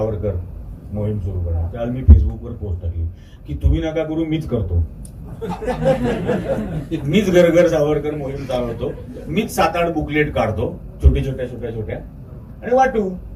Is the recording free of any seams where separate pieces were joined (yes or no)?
yes